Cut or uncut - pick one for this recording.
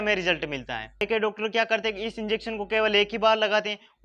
cut